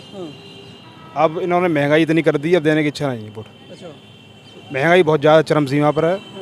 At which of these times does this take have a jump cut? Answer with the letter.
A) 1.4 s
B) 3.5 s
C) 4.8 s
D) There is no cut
D